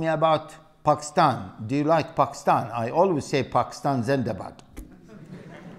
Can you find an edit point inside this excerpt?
no; 0 cuts

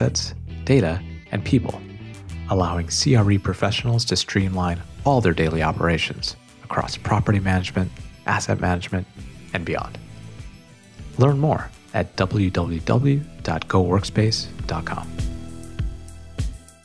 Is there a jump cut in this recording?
yes; 1 cut; at 15.0 s

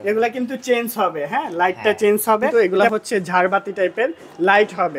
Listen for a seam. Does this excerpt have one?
yes; 1 cut; at 2.5 s

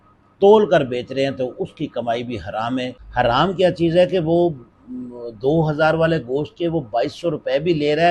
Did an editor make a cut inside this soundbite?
yes; 1 cut; at 3.0 s

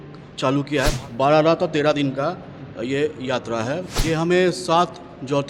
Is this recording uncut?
no; 2 cuts; at 0.9 s, 3.9 s

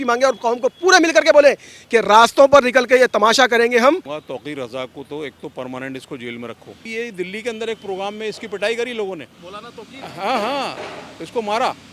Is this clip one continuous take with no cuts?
no; 2 cuts; at 4.2 s, 6.8 s

